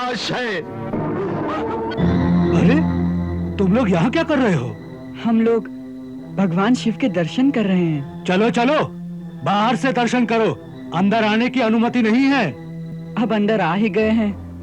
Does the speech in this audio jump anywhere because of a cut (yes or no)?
yes